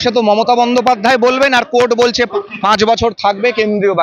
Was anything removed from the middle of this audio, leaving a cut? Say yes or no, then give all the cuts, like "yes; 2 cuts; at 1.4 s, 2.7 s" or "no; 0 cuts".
yes; 1 cut; at 2.3 s